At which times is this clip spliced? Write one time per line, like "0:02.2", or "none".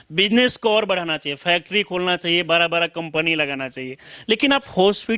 none

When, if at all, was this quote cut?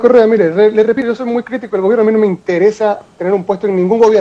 0:01.0

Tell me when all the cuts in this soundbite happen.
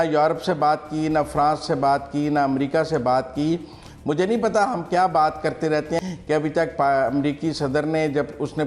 0:06.0

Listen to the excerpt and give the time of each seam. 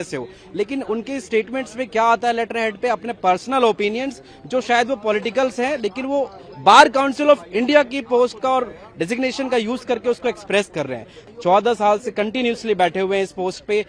0:11.2

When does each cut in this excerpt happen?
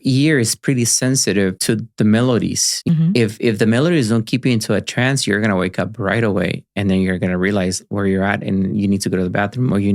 0:01.6
0:02.9

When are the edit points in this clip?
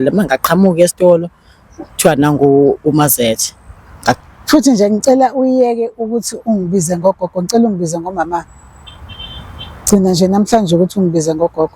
0:04.2

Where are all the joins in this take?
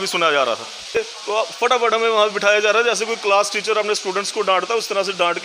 0:01.0

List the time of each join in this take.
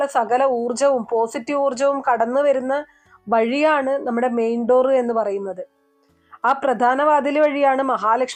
none

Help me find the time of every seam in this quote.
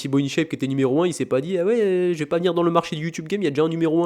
none

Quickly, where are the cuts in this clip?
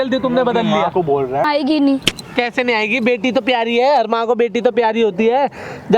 0:01.5

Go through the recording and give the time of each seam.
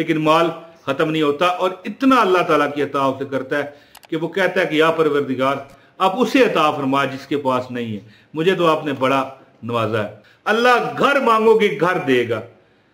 0:10.2

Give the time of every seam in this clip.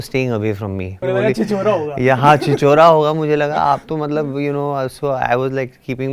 0:01.0

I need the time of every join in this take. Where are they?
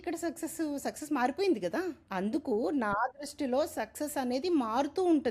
0:02.1

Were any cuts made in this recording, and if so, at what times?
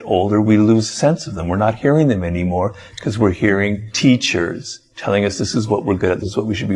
0:03.9

